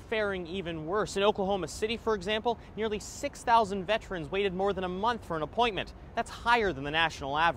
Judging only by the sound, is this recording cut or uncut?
uncut